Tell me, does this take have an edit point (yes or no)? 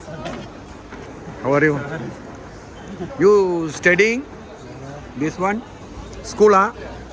no